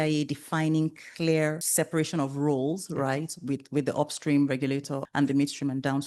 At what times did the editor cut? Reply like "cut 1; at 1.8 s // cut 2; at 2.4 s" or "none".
cut 1; at 1.6 s // cut 2; at 5.0 s